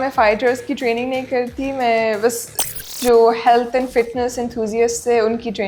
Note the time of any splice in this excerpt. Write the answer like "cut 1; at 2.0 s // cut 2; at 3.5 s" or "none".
none